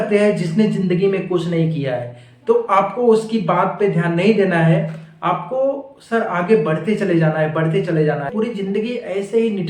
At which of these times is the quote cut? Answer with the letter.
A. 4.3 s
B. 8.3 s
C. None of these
B